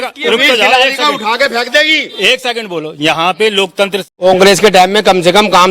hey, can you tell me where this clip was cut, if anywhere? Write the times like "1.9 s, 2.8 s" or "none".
4.0 s